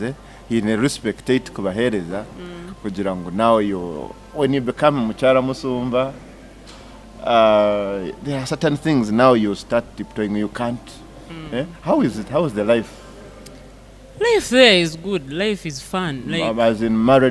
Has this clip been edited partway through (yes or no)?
no